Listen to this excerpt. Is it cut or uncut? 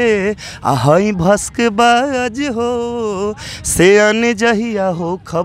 uncut